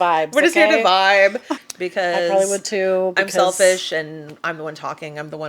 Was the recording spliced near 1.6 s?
yes; 1 cut; at 1.6 s

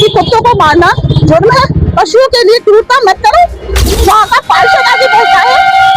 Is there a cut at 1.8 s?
yes; 2 cuts; at 1.8 s, 4.0 s

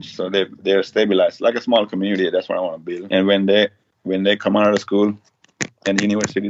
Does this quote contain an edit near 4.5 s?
no; 1 cut; at 2.9 s

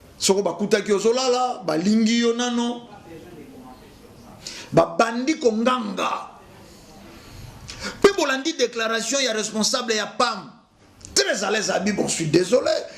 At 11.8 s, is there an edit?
no; 1 cut; at 7.7 s

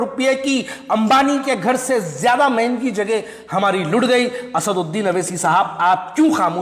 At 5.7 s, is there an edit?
no; 0 cuts

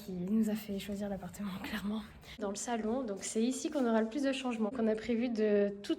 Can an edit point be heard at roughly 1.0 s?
no; 2 cuts; at 2.4 s, 4.8 s

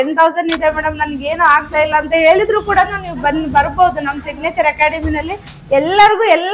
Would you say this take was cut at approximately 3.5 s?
no; 0 cuts

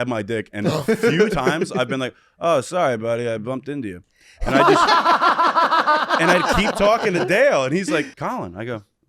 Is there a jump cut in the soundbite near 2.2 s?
no; 1 cut; at 8.1 s

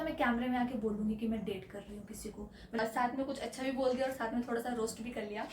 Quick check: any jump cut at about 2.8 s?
yes; 1 cut; at 2.8 s

